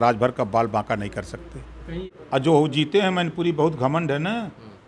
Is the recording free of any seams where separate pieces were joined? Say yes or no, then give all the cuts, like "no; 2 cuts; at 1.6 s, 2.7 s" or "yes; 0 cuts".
no; 1 cut; at 2.0 s